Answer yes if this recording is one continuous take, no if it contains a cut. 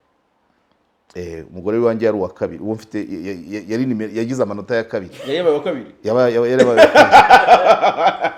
yes